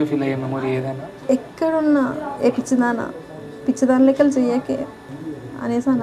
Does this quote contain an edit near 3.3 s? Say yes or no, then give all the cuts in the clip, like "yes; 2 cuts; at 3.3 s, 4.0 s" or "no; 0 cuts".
no; 2 cuts; at 1.1 s, 5.0 s